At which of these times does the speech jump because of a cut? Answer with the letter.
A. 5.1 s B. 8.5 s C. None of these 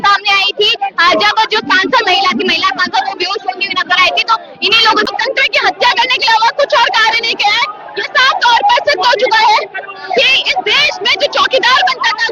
A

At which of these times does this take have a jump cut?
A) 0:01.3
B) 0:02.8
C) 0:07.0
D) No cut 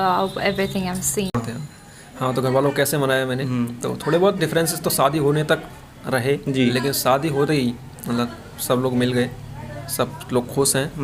A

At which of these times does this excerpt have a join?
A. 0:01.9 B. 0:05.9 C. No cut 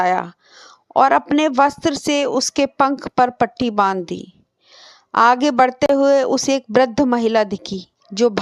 B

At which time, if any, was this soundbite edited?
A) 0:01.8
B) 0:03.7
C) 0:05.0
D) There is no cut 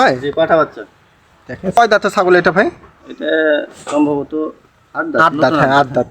A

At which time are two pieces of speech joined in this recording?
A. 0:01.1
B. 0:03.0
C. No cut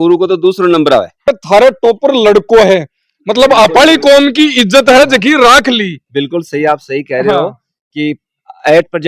A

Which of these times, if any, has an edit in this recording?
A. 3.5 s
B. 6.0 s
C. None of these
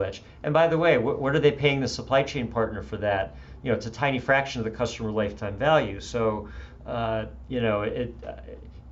C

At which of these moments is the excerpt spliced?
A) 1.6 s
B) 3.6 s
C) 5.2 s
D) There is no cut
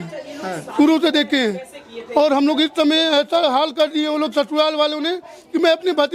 D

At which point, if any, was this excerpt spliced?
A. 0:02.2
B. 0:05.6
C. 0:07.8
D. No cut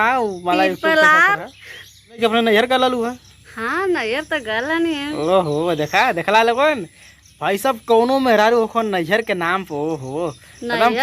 A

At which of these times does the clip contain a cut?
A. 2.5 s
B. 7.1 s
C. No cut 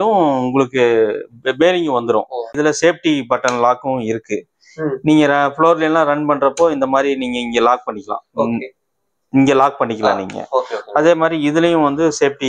A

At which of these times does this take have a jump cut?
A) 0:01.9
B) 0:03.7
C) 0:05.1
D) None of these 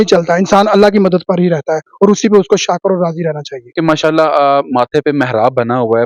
B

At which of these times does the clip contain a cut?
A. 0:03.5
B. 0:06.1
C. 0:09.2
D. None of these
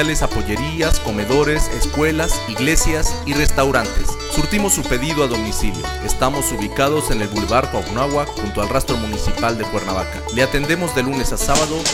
D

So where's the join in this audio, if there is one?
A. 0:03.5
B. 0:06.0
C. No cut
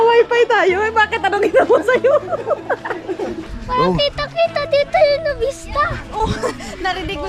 A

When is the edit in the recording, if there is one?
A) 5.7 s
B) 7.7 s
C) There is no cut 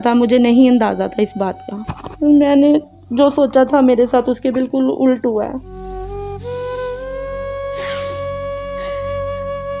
A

